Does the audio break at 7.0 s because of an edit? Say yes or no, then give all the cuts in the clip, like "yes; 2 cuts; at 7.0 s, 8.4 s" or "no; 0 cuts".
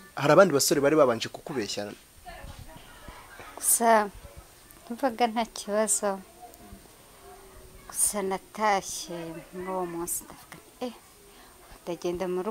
no; 1 cut; at 2.8 s